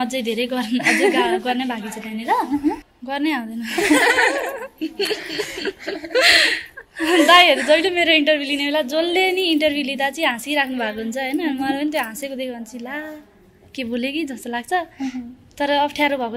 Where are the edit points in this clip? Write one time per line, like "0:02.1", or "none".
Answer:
0:02.9